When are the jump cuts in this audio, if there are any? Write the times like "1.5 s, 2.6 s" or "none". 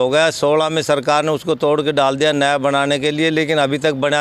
none